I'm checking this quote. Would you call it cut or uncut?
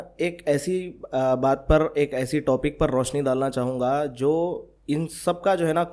uncut